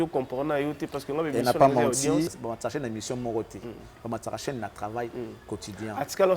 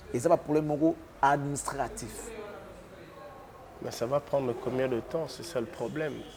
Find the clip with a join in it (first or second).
first